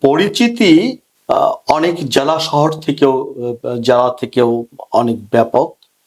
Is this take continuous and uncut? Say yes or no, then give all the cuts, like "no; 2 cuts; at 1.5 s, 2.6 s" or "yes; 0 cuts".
no; 1 cut; at 1.1 s